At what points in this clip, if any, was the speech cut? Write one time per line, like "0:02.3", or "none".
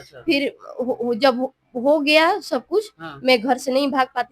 none